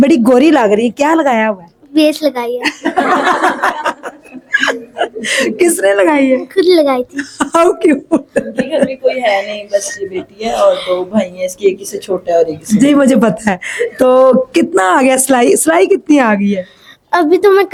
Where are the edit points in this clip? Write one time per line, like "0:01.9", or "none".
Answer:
none